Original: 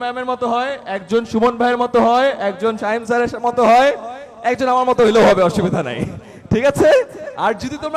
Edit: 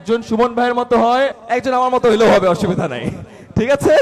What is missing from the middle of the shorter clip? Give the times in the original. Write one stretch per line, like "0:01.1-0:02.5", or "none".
0:02.4-0:04.3